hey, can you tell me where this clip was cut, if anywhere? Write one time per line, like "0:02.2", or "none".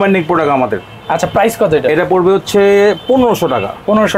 none

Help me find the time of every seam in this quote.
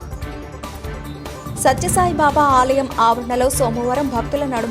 0:01.0

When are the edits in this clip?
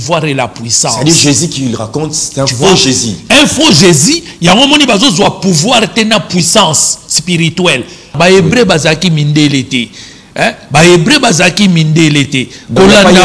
0:08.1

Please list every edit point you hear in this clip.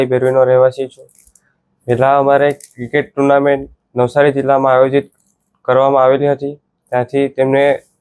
none

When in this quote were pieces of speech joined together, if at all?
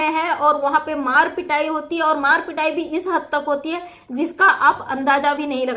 none

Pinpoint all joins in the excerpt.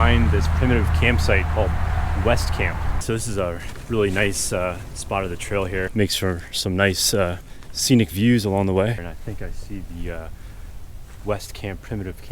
0:03.0
0:05.9
0:09.0

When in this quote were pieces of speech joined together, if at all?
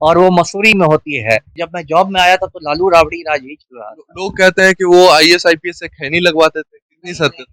0:01.6

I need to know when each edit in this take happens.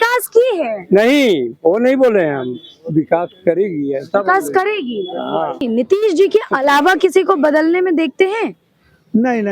0:05.6

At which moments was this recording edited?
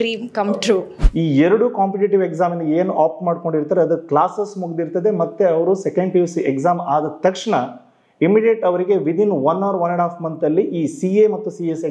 0:01.0

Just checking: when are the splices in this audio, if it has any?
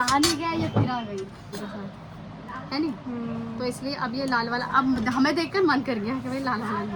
none

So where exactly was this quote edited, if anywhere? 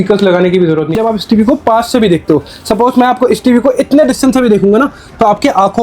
0:00.9

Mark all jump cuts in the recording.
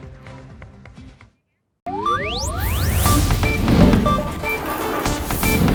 none

